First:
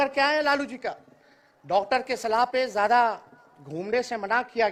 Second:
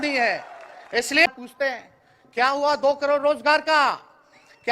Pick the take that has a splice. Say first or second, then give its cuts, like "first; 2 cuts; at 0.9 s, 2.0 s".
second; 1 cut; at 1.3 s